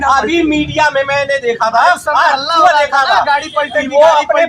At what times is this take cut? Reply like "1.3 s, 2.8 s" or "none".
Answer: none